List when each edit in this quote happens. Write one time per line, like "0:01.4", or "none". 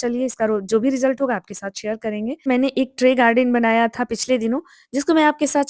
0:02.5